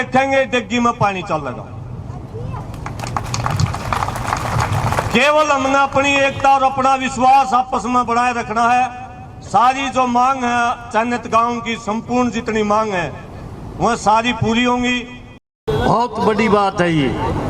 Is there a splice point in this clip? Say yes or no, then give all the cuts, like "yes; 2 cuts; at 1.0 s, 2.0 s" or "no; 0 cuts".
no; 0 cuts